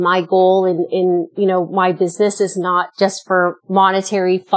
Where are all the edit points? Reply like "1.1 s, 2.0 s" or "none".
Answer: 1.3 s, 3.2 s

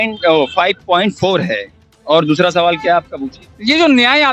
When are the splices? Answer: none

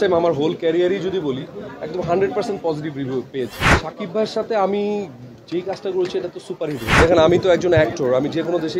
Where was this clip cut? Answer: 3.8 s, 6.9 s

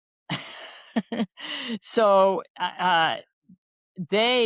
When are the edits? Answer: none

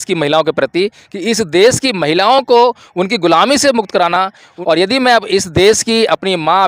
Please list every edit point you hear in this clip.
4.5 s

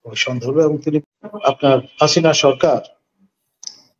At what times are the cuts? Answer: 1.0 s

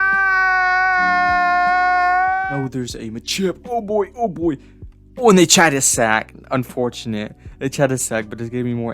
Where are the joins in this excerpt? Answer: 2.5 s

